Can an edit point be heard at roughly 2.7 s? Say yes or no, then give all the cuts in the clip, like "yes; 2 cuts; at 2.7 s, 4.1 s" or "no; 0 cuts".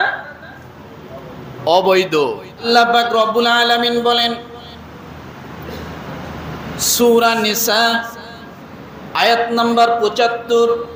yes; 1 cut; at 2.7 s